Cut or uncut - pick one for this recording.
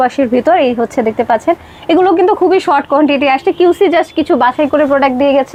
uncut